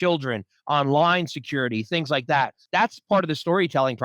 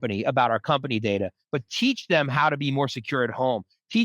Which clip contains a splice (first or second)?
first